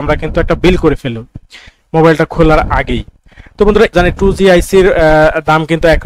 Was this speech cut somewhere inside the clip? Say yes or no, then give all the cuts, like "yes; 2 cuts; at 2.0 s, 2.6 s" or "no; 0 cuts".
yes; 1 cut; at 3.9 s